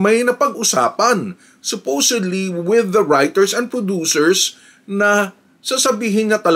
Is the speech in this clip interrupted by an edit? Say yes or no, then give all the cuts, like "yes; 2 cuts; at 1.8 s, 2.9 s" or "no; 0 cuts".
no; 0 cuts